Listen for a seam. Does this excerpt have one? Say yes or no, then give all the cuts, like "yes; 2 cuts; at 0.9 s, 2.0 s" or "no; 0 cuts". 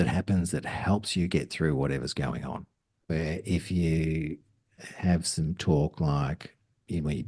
yes; 1 cut; at 2.9 s